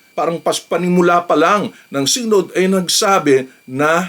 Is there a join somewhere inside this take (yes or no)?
no